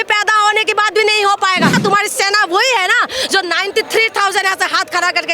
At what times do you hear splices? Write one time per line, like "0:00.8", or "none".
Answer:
0:01.8